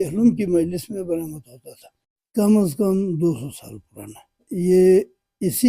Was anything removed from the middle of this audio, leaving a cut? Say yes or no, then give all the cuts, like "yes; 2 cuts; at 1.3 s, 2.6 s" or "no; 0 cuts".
yes; 1 cut; at 2.2 s